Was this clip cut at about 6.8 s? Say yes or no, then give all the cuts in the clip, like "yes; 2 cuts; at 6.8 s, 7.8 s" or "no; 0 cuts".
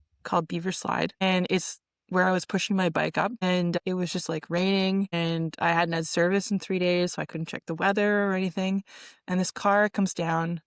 no; 3 cuts; at 1.2 s, 3.8 s, 5.1 s